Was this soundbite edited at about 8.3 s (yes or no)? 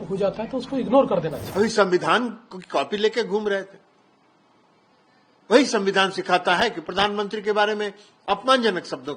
no